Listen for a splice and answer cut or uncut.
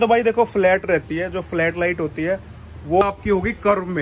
cut